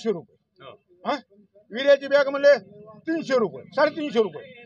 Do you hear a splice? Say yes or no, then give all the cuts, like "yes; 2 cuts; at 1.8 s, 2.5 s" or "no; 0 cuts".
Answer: no; 0 cuts